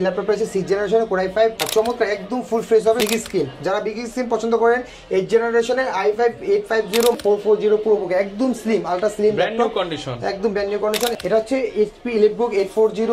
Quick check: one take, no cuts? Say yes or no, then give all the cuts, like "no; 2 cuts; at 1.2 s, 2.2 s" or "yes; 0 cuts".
no; 4 cuts; at 1.6 s, 3.0 s, 7.2 s, 11.1 s